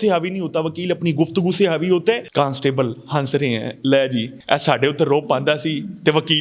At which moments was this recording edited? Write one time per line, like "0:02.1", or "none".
0:02.2
0:04.3